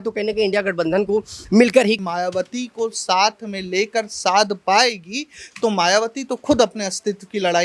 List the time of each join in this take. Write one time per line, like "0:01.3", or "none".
0:02.0